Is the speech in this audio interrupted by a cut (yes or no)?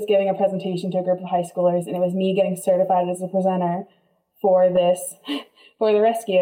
no